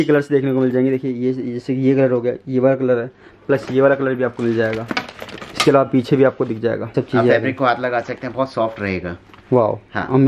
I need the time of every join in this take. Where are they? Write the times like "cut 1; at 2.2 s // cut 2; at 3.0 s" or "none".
cut 1; at 6.9 s